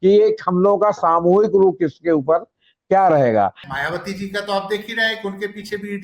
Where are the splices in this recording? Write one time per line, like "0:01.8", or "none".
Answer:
0:03.6